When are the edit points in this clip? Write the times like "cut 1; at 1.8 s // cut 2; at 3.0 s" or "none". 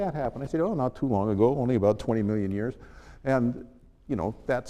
none

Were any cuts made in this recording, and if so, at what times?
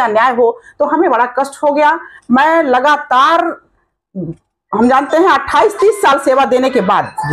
none

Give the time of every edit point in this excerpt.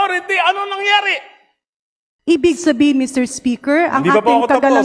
cut 1; at 2.0 s

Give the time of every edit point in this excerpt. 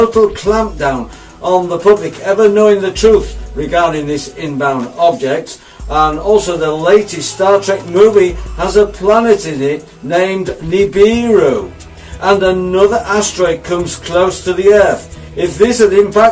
none

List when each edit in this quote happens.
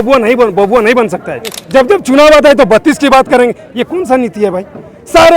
cut 1; at 1.6 s

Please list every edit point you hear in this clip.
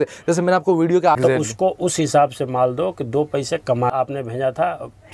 cut 1; at 1.2 s // cut 2; at 3.9 s

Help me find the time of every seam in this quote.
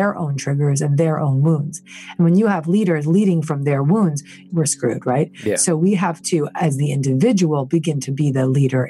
cut 1; at 4.4 s

